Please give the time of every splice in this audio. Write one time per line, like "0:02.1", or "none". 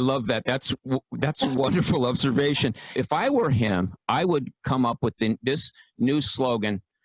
0:02.9